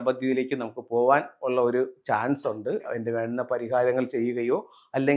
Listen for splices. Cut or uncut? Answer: cut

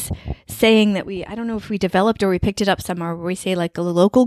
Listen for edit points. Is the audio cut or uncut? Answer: uncut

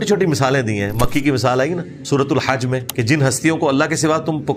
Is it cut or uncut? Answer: cut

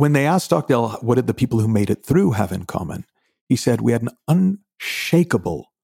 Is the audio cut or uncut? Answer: cut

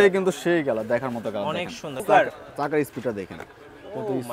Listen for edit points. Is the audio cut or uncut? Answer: cut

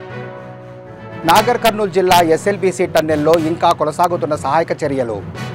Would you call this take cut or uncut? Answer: cut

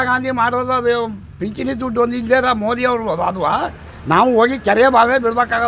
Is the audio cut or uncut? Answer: uncut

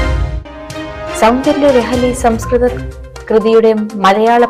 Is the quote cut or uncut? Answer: cut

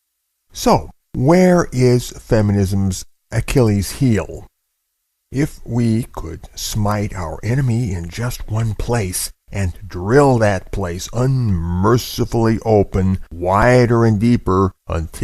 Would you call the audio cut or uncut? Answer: cut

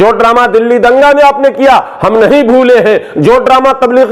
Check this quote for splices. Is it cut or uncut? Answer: uncut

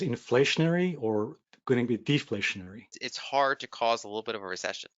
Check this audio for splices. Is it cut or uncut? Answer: cut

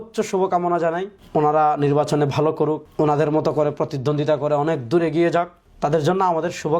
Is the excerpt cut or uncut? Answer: cut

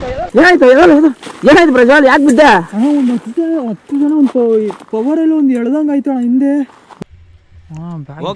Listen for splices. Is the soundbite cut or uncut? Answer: cut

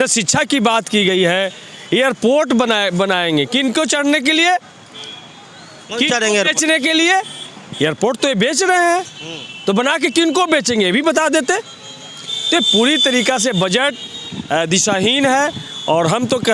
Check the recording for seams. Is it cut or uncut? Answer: uncut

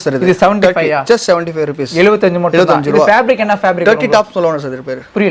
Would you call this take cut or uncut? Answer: uncut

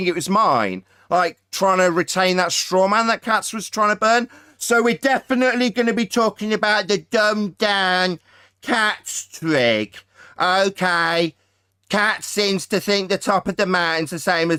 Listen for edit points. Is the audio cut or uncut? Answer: uncut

